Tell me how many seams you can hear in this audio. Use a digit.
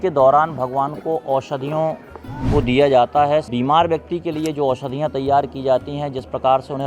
1